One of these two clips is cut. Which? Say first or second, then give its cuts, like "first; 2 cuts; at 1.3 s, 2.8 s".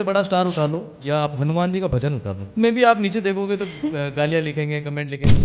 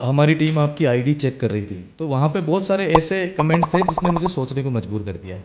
first; 2 cuts; at 0.9 s, 2.5 s